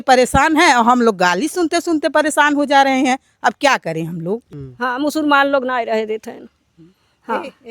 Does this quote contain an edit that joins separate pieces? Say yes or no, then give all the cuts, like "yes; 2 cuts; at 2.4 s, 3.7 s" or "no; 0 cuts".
yes; 1 cut; at 4.4 s